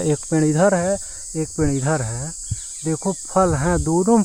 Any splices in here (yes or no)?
no